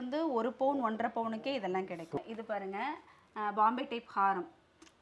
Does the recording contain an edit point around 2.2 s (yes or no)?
yes